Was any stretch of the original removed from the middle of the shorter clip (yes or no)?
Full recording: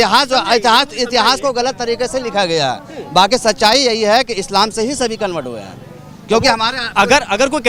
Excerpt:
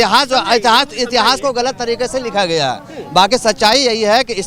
no